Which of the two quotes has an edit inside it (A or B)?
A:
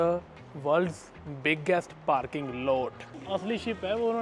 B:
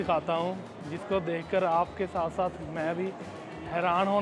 A